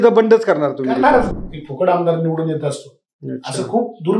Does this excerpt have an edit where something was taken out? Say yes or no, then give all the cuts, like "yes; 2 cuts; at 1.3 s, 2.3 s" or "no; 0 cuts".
yes; 1 cut; at 1.4 s